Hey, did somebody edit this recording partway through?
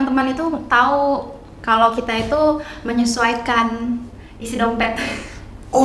no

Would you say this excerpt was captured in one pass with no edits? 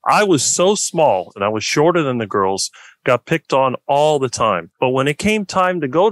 no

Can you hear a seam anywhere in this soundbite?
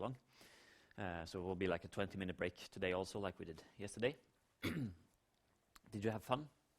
yes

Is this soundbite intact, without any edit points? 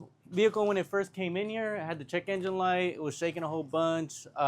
yes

